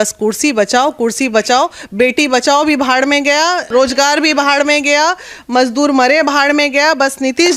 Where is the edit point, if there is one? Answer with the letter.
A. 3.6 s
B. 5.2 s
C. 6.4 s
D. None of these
A